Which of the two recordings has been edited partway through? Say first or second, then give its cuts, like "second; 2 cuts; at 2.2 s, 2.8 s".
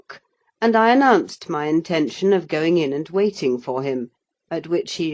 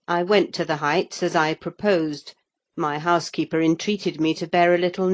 second; 1 cut; at 1.3 s